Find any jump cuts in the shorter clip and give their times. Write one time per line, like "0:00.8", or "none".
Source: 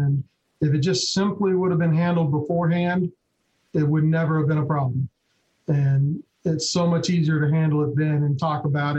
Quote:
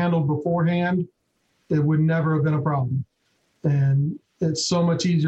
none